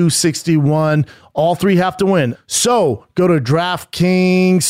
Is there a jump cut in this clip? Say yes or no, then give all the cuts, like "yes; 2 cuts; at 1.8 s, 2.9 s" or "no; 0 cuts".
yes; 1 cut; at 2.3 s